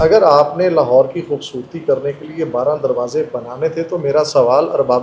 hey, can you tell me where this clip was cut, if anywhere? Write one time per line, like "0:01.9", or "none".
none